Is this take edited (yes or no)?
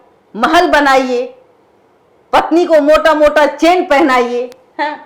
no